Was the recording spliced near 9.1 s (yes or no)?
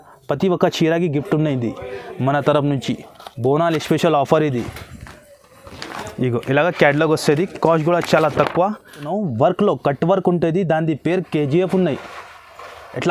yes